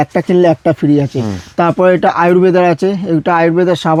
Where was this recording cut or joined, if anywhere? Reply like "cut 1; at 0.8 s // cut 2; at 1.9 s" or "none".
none